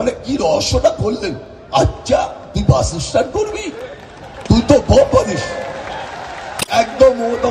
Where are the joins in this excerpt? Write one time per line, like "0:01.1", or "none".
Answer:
0:06.5